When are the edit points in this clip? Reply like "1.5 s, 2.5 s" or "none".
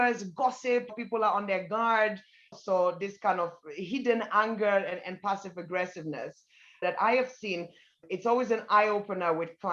2.5 s, 6.8 s